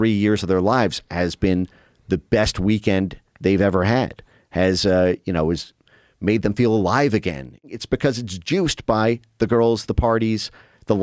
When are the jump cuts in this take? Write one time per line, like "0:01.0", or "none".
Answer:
0:07.6

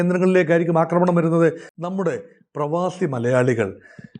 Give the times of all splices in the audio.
0:01.7

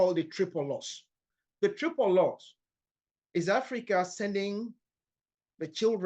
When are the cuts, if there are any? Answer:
0:01.3

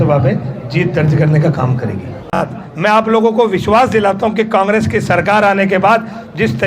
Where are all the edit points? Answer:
0:02.4

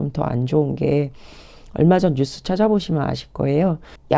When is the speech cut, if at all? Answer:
none

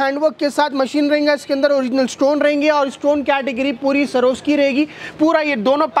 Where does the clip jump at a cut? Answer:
none

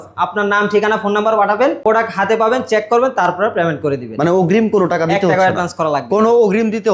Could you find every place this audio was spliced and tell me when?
0:01.8

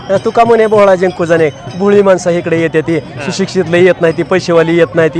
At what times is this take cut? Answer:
none

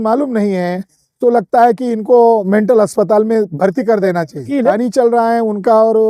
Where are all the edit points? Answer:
0:04.7

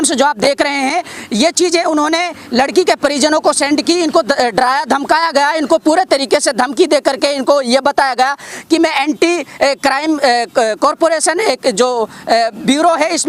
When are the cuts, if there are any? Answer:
none

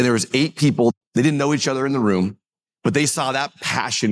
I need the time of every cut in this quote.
0:00.9

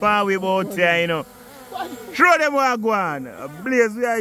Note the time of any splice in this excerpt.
none

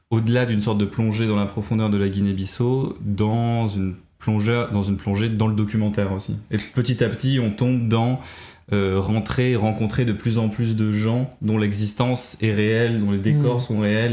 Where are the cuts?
none

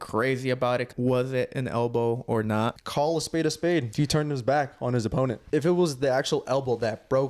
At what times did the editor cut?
0:00.9
0:02.8
0:03.9
0:05.4

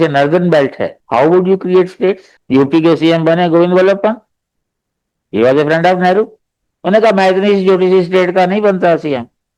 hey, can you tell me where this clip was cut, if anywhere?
0:00.9
0:02.3

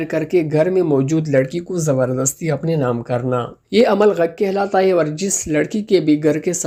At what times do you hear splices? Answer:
none

